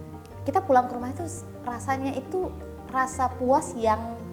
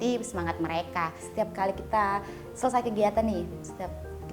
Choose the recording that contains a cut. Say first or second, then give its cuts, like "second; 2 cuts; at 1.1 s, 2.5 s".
second; 1 cut; at 1.2 s